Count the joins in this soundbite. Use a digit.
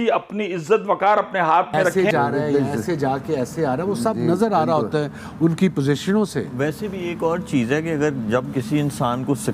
1